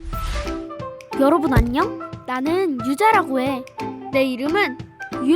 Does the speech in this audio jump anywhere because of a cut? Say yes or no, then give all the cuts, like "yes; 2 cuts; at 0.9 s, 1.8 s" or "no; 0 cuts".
no; 0 cuts